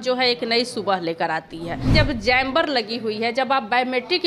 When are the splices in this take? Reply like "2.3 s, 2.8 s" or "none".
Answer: 1.9 s